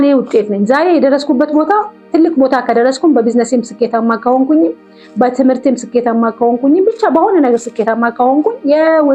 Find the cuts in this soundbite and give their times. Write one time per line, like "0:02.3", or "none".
none